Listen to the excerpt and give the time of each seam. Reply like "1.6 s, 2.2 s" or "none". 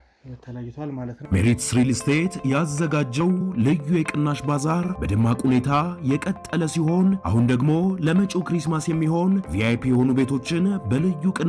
1.2 s